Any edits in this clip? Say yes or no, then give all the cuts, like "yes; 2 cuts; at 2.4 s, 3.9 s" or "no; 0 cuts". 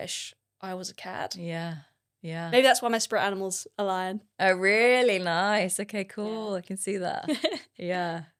no; 0 cuts